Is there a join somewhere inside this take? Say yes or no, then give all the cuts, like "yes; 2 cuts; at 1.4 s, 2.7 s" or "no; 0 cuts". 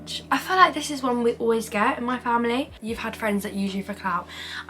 yes; 1 cut; at 2.7 s